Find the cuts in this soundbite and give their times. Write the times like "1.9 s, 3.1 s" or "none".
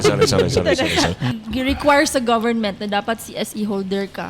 1.3 s